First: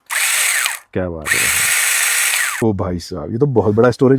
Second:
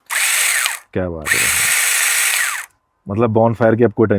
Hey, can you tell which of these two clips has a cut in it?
first; 1 cut; at 2.6 s

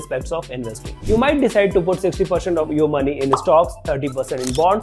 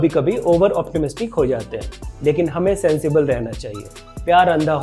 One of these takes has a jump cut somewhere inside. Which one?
first; 2 cuts; at 0.9 s, 2.7 s

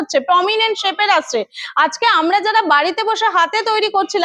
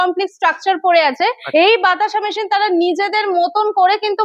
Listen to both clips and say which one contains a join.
second; 1 cut; at 1.4 s

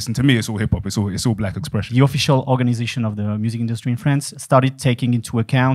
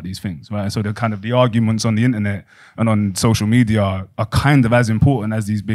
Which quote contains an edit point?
first; 2 cuts; at 1.9 s, 4.3 s

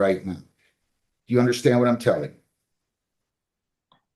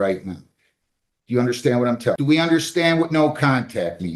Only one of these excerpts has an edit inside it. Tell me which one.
second; 1 cut; at 2.2 s

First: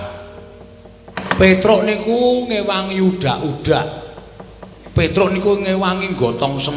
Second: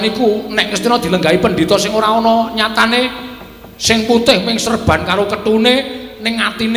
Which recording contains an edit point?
first; 1 cut; at 1.2 s

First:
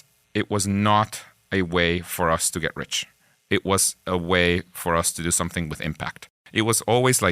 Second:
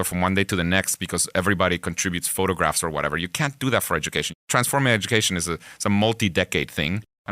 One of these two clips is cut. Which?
first; 1 cut; at 6.3 s

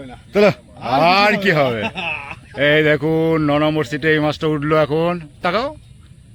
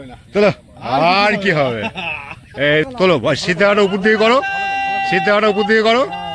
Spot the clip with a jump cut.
second; 1 cut; at 2.8 s

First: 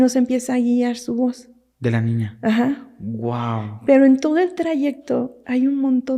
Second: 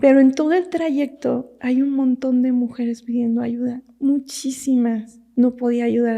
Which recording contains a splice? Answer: second; 1 cut; at 5.1 s

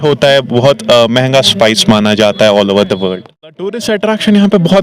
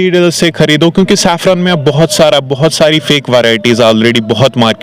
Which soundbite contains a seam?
first; 1 cut; at 3.7 s

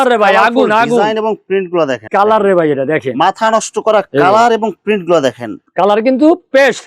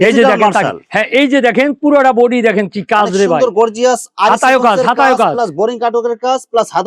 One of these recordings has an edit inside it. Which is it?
first; 2 cuts; at 2.0 s, 5.6 s

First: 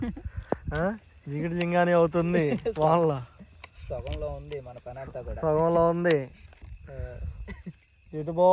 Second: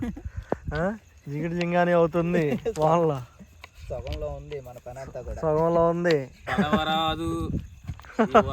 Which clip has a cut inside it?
second; 1 cut; at 6.5 s

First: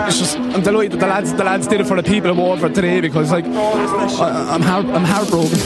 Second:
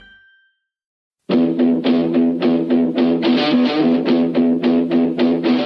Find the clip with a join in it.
second; 1 cut; at 1.0 s

